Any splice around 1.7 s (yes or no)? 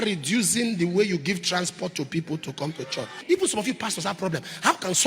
no